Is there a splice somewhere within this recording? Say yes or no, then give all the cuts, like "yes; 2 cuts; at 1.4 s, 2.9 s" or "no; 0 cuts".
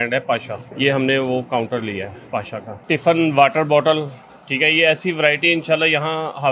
yes; 1 cut; at 2.8 s